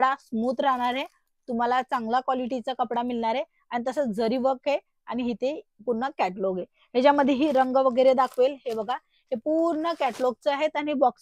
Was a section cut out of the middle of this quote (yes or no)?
no